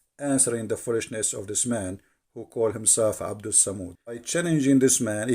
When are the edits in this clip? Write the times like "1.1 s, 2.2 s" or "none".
4.2 s